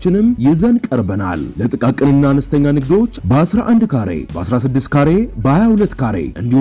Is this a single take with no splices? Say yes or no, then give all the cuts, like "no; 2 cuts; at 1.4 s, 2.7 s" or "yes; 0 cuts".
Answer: yes; 0 cuts